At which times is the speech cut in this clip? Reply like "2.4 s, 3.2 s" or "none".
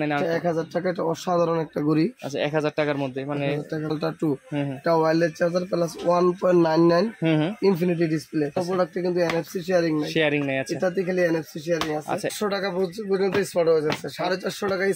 3.9 s, 8.6 s, 12.3 s